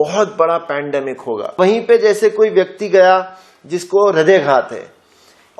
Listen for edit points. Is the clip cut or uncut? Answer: cut